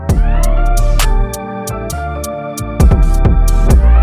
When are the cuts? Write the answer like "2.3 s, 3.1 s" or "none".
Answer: none